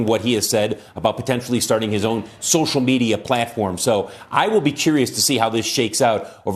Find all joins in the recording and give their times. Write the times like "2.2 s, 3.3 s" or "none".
none

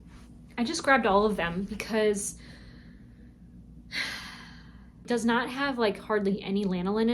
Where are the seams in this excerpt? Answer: 5.1 s

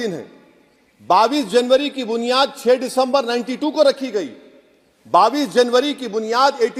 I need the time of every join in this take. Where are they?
none

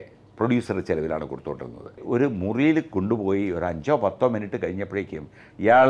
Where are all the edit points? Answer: 2.0 s

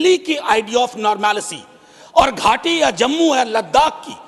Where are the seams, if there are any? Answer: none

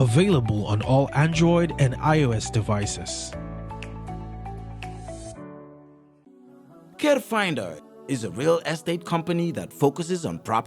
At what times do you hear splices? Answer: 6.2 s

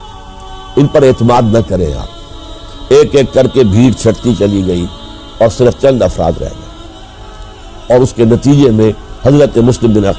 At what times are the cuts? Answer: 2.7 s

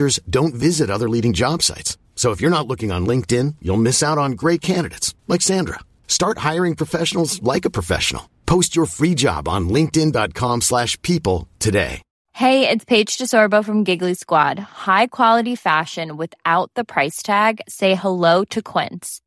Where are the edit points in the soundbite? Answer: 12.2 s

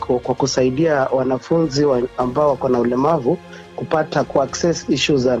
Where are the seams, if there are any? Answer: none

